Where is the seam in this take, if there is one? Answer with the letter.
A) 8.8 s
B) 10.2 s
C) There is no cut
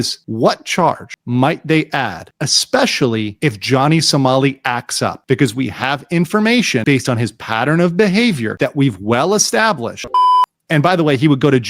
B